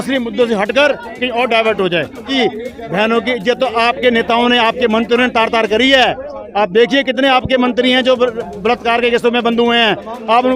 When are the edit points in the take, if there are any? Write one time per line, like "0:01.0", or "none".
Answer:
0:02.3